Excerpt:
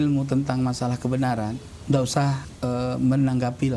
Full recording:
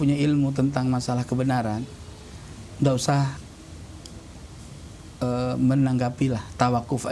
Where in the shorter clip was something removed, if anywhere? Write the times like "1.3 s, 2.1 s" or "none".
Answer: 1.7 s, 2.5 s

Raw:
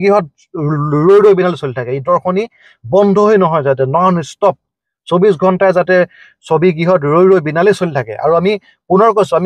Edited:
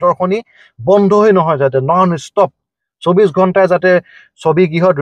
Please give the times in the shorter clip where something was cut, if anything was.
none

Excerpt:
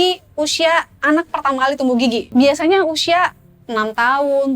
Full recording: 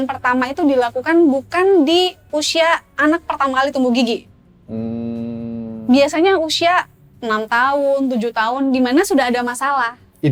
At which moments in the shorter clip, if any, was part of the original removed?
2.3 s

